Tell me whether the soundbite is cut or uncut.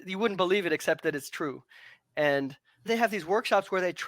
cut